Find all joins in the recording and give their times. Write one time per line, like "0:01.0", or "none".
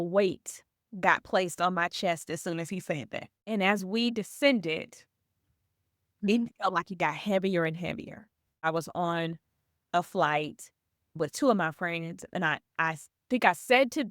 0:03.4
0:08.6
0:11.1